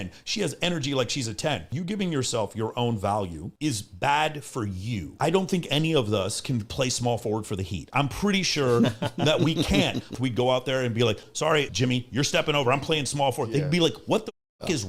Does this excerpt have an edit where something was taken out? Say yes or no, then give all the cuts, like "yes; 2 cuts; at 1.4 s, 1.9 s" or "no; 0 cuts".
yes; 4 cuts; at 1.7 s, 5.1 s, 10.1 s, 11.6 s